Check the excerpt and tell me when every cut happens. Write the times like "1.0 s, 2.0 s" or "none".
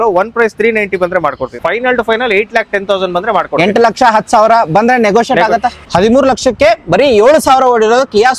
1.6 s, 5.8 s